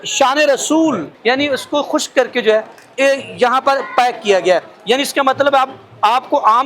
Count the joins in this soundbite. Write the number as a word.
one